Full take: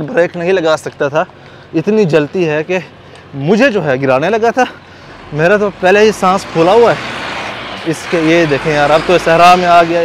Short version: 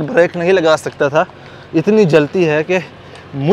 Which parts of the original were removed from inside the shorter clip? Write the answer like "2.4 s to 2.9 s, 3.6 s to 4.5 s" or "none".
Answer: none